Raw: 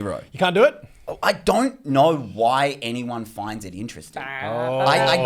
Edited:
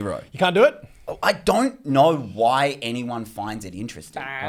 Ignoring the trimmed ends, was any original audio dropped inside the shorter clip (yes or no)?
no